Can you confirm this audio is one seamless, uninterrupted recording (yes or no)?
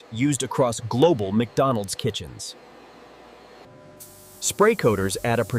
no